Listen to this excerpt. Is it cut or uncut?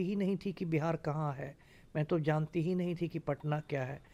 uncut